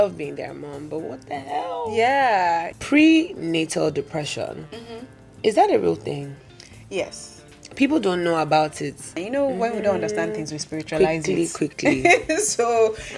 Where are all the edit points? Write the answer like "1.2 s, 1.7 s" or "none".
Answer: 2.7 s, 8.8 s